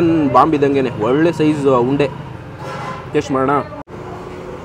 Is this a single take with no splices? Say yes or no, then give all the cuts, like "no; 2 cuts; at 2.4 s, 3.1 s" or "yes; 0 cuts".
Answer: yes; 0 cuts